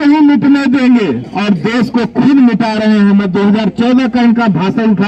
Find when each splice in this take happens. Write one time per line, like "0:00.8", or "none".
none